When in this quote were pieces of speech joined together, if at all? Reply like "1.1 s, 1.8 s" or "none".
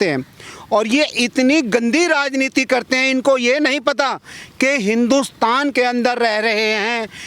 none

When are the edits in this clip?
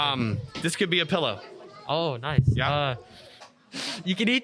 3.5 s

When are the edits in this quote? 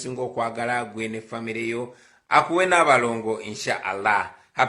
3.5 s

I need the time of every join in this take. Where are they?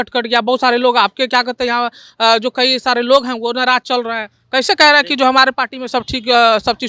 none

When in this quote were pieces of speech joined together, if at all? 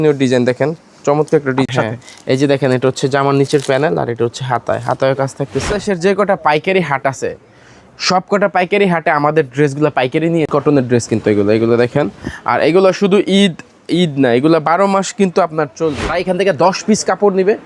1.7 s, 5.7 s, 10.5 s, 16.1 s

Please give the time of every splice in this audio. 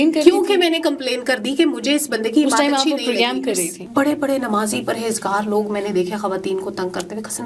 3.8 s

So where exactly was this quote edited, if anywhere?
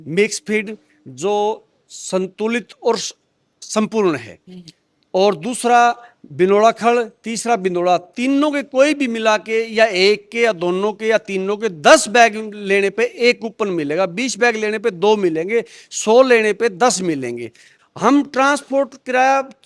17.7 s

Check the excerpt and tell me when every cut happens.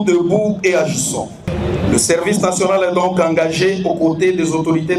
1.4 s

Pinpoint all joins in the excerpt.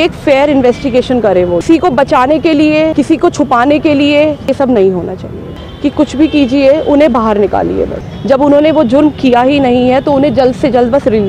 1.6 s, 2.9 s, 4.5 s, 5.5 s, 8.1 s

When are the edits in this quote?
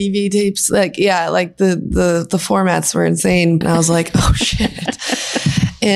3.6 s

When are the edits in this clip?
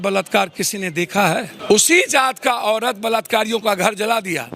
1.5 s

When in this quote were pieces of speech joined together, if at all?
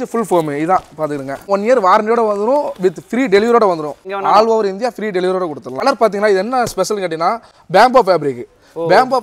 1.5 s, 4.0 s, 5.8 s

